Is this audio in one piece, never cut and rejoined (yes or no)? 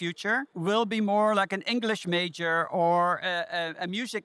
yes